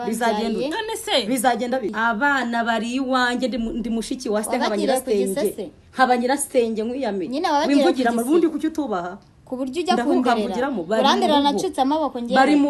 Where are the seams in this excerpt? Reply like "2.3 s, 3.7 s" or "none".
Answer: 1.9 s